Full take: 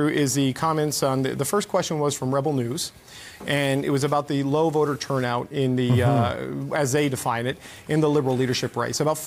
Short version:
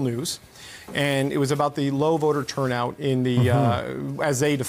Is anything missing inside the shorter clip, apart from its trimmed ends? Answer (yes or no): no